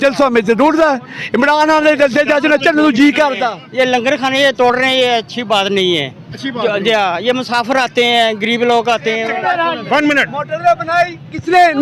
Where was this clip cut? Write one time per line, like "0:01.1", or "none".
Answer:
0:03.6
0:09.3

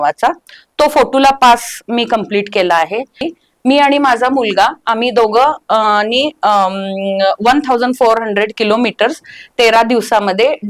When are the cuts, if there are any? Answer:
0:03.3

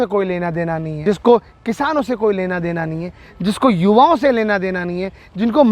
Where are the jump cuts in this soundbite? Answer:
0:00.9

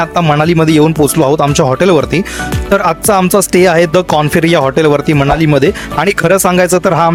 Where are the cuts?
none

